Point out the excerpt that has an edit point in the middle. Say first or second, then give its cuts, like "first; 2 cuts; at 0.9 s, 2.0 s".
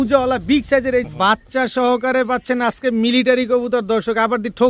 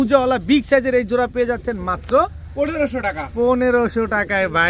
first; 1 cut; at 1.1 s